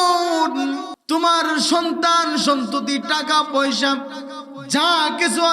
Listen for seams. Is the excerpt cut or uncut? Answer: cut